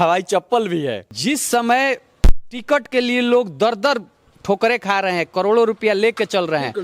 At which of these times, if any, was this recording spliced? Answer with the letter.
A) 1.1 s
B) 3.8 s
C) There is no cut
A